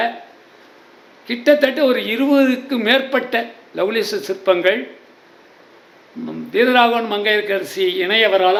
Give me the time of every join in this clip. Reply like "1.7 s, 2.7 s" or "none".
none